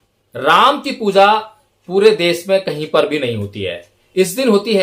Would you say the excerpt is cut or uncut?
uncut